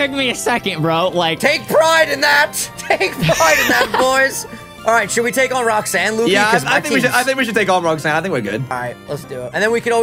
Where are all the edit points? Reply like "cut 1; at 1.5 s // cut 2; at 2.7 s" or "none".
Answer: cut 1; at 8.7 s